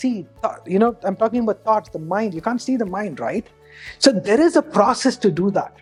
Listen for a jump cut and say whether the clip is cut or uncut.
uncut